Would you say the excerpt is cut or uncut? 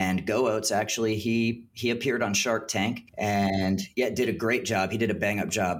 cut